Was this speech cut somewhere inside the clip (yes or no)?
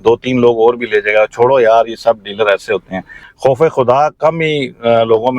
yes